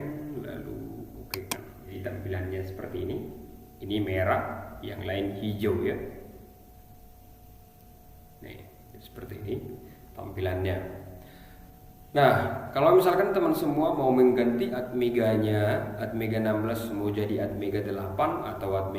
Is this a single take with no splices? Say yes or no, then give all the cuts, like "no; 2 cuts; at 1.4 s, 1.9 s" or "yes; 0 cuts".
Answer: no; 1 cut; at 1.9 s